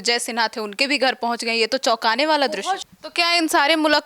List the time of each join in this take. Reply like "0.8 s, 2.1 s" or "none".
2.8 s